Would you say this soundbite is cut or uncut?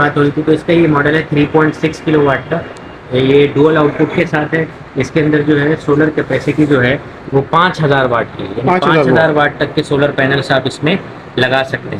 uncut